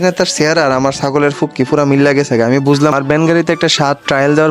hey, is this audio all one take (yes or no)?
no